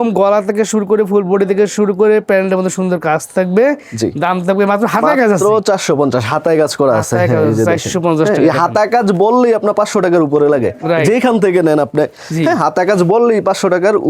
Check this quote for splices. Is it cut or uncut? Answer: uncut